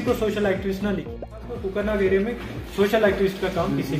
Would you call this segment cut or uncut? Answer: cut